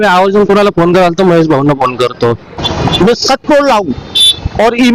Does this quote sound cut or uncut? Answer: cut